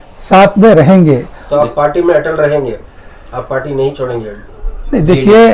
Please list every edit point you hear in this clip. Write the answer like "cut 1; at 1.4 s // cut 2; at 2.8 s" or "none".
cut 1; at 1.4 s